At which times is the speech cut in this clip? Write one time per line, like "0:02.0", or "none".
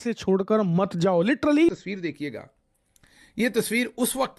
0:01.7